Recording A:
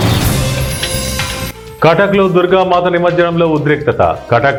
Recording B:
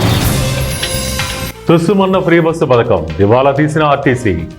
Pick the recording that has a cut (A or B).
B